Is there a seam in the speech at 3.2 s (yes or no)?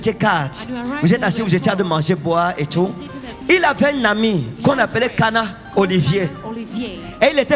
yes